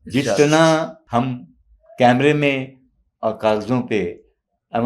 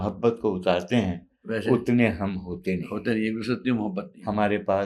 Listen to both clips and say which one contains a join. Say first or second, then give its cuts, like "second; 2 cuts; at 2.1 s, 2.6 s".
first; 1 cut; at 1.0 s